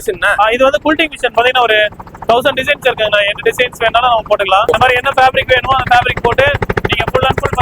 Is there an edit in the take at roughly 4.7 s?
yes; 2 cuts; at 1.3 s, 4.7 s

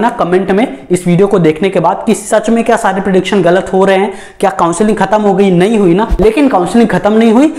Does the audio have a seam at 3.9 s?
no; 1 cut; at 6.1 s

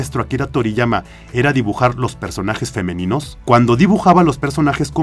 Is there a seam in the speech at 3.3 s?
yes; 1 cut; at 3.3 s

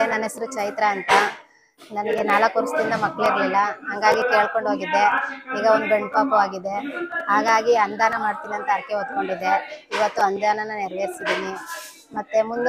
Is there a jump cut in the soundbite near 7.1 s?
no; 0 cuts

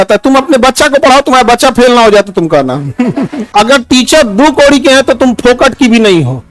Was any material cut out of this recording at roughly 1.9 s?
no; 1 cut; at 3.5 s

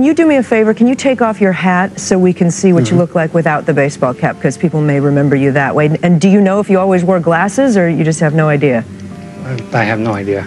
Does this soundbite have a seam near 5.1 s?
no; 0 cuts

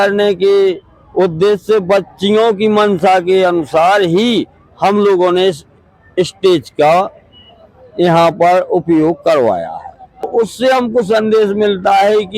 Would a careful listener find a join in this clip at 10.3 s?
yes; 1 cut; at 10.3 s

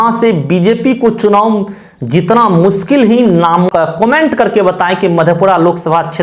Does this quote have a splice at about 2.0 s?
no; 1 cut; at 3.7 s

